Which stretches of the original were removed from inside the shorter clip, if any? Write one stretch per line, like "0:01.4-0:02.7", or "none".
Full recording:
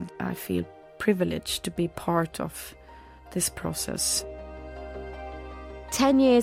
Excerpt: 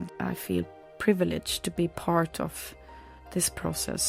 none